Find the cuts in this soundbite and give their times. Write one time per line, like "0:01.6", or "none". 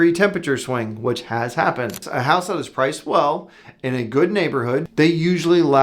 0:02.1
0:04.9